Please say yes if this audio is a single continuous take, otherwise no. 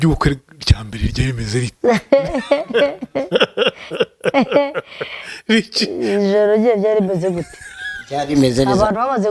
yes